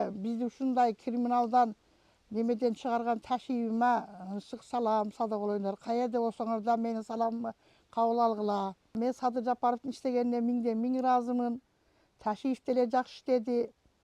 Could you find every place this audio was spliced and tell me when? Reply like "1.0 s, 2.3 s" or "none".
9.0 s